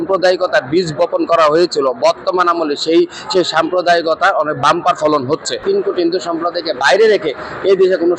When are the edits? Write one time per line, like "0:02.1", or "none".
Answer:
0:05.6